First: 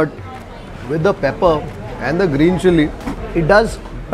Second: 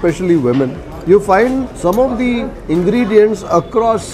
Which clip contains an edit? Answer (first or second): second